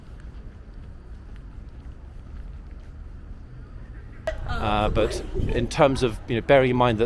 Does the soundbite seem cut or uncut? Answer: cut